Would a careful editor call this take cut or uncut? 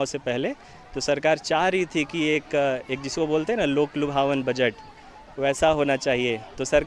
uncut